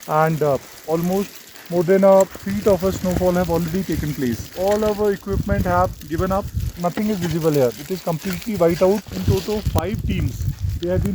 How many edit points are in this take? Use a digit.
2